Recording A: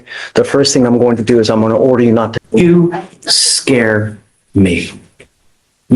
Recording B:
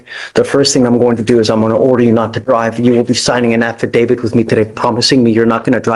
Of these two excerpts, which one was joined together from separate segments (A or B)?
A